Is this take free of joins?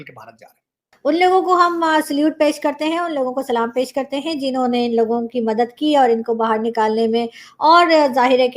no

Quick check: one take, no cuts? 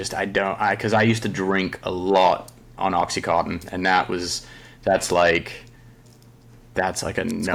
yes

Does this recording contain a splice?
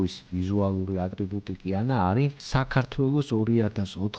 yes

